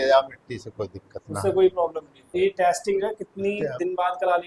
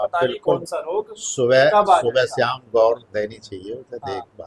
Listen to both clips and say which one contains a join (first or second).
first